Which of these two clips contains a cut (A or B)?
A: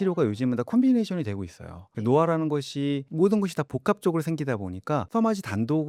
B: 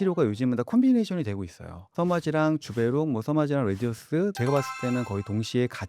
B